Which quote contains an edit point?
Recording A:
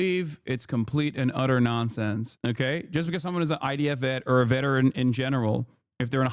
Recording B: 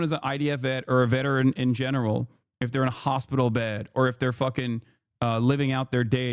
A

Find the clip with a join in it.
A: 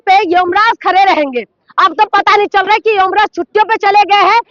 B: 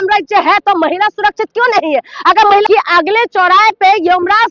B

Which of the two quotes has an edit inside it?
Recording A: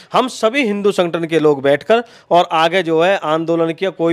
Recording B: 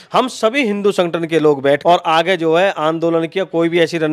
B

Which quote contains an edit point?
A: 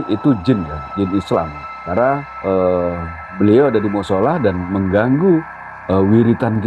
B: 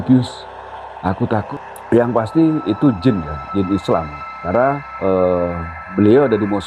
B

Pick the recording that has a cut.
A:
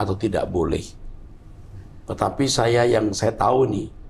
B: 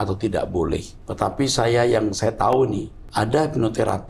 B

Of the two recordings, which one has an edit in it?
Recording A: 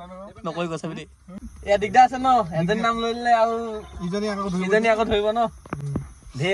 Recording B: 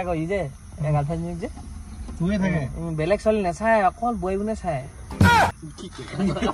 A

